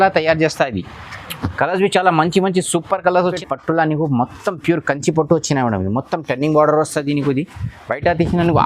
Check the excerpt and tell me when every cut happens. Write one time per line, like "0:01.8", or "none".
0:03.2